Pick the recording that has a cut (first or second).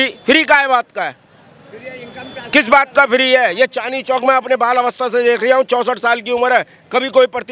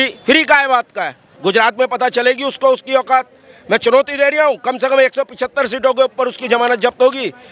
second